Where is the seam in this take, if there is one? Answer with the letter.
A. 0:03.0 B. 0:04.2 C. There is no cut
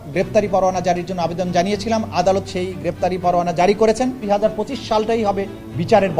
B